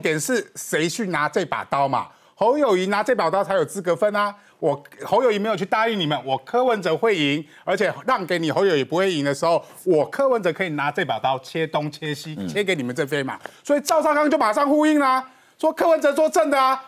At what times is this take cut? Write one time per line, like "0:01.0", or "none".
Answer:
none